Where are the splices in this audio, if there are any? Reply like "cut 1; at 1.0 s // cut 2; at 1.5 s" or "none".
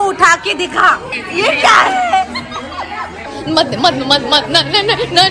cut 1; at 1.1 s // cut 2; at 3.2 s